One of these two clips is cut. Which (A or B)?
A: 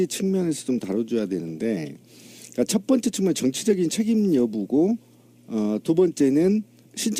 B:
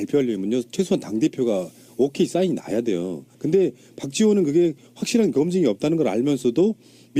B